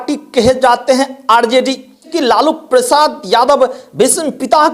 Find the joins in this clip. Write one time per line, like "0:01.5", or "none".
0:02.1